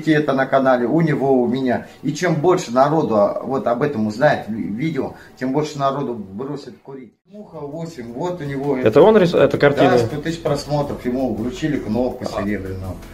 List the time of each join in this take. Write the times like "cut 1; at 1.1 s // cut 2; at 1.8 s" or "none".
cut 1; at 7.5 s